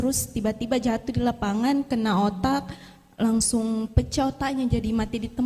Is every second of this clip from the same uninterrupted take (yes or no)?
yes